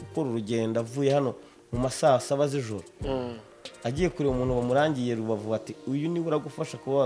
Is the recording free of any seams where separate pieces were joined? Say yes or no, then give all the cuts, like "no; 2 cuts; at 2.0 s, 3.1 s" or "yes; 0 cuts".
yes; 0 cuts